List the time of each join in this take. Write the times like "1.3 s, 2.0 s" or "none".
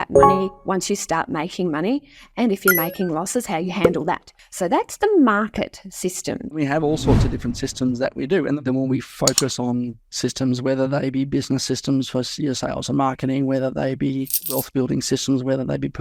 6.5 s, 8.6 s